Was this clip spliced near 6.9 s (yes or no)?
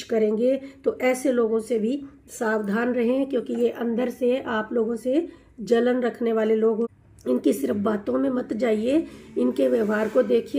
yes